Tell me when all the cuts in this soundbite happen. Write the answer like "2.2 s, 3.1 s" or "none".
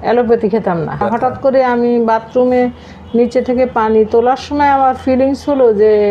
1.0 s